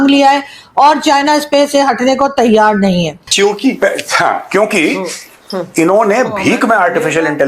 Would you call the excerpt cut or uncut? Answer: cut